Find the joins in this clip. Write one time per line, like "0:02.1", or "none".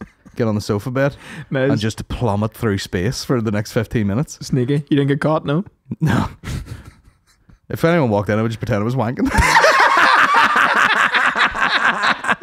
none